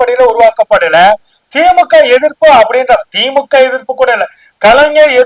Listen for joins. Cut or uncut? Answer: uncut